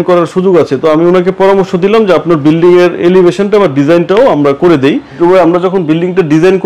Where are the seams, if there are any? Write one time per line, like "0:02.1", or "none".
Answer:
0:05.2